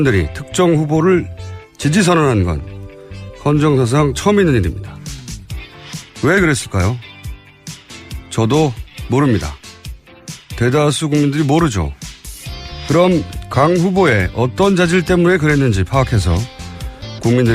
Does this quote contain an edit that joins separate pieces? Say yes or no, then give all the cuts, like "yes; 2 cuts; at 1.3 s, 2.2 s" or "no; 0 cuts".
yes; 1 cut; at 13.4 s